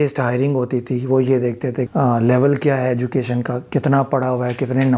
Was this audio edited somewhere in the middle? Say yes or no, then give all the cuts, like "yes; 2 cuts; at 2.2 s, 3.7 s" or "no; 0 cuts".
yes; 1 cut; at 1.9 s